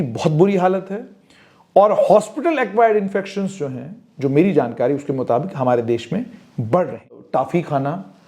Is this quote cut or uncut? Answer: cut